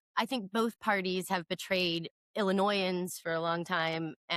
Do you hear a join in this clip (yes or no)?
no